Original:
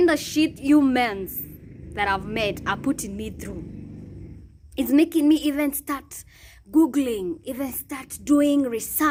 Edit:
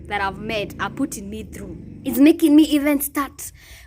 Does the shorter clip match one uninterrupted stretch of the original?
no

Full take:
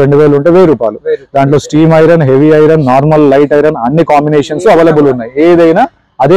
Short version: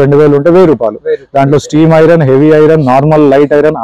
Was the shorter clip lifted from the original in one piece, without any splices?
yes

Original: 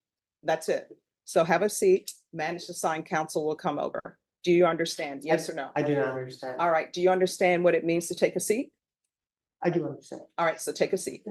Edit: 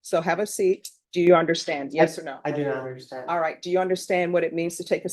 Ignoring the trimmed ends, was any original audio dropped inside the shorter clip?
yes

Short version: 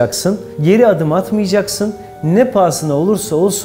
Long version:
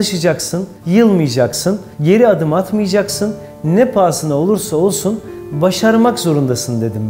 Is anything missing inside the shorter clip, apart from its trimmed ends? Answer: no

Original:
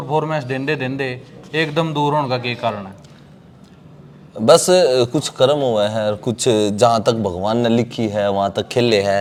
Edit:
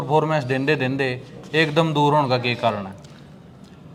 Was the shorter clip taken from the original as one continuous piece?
yes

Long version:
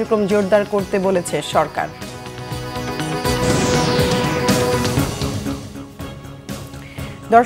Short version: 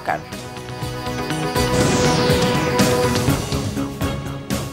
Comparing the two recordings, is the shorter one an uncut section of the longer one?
no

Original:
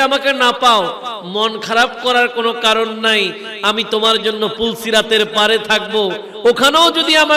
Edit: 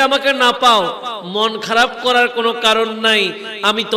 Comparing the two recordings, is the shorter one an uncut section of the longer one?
yes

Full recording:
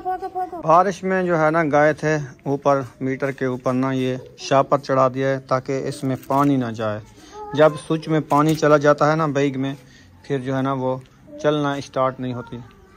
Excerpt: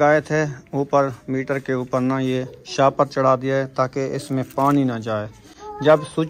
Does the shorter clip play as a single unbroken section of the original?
yes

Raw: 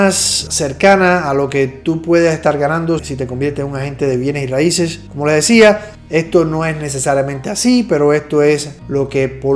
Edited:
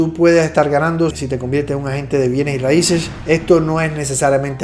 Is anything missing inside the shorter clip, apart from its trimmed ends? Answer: yes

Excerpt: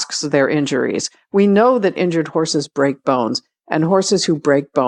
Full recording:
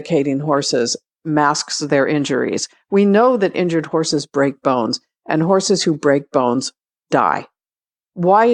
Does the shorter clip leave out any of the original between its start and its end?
no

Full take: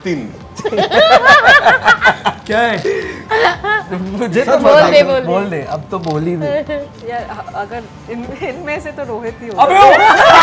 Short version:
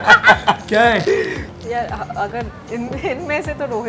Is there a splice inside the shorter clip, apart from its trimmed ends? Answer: yes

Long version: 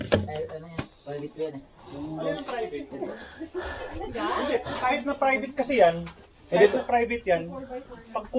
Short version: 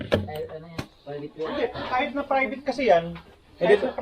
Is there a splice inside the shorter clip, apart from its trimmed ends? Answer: yes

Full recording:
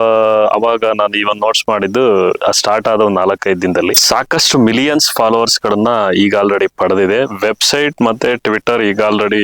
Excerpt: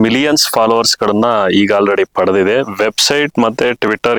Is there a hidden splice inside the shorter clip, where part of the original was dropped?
no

